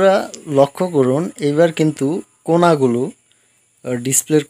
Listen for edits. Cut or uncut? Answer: uncut